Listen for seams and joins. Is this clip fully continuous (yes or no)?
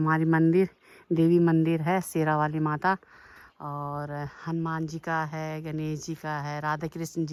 yes